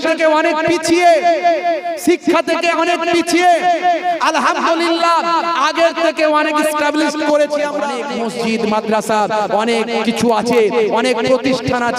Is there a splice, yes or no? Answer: yes